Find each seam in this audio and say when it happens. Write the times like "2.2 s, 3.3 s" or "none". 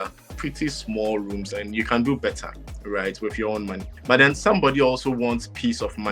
none